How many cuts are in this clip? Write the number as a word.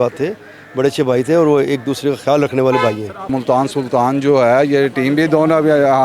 one